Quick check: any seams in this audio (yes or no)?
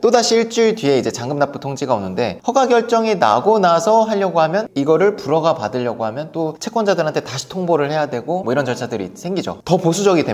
no